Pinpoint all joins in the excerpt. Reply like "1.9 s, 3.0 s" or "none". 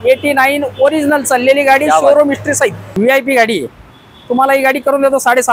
2.9 s